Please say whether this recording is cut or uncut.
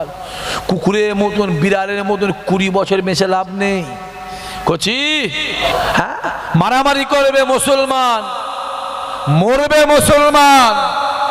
cut